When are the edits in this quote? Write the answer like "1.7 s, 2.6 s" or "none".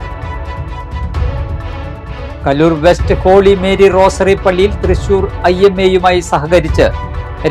2.2 s

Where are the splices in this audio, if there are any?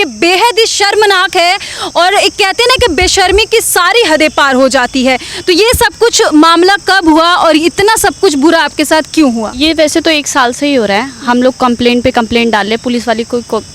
none

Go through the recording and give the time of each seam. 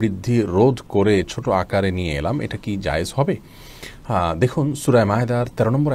none

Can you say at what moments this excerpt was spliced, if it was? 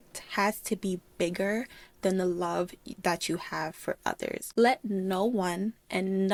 none

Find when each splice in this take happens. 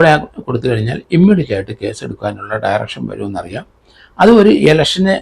none

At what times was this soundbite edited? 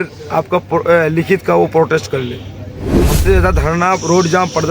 3.0 s

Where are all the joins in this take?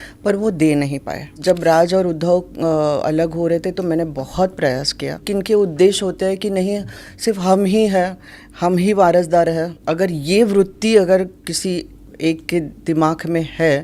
1.4 s, 5.2 s, 9.8 s

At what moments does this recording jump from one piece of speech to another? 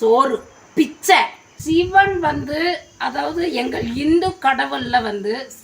1.5 s

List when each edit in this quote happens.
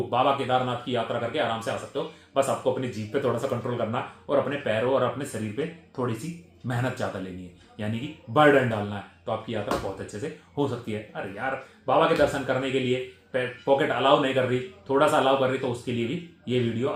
none

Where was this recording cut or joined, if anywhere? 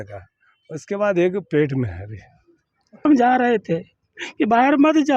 3.1 s

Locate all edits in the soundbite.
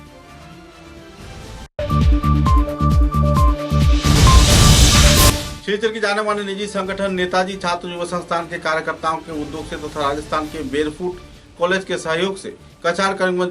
1.7 s, 5.3 s

